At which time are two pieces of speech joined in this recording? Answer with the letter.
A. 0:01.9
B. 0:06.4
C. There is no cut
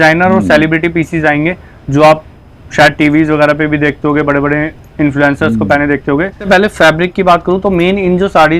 B